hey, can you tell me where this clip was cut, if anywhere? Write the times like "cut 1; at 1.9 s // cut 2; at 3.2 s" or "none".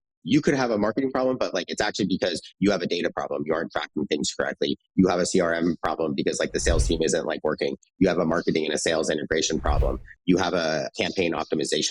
cut 1; at 10.9 s